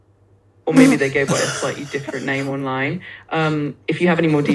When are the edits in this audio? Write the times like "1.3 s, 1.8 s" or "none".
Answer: none